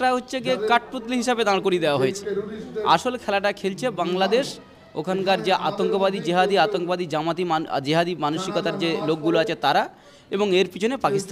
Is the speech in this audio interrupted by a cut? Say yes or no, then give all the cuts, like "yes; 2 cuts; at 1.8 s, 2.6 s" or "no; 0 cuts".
no; 0 cuts